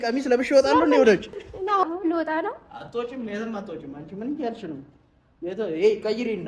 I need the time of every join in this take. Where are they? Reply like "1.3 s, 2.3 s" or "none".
1.8 s